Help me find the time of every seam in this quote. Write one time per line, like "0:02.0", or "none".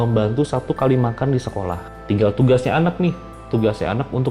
0:01.9